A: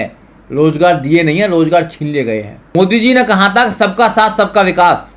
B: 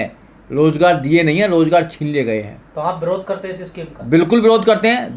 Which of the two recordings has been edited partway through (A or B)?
A